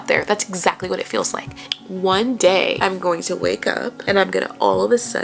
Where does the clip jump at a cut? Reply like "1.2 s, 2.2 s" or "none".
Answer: 1.5 s, 2.8 s, 4.0 s